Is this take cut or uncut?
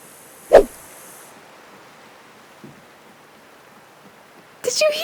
uncut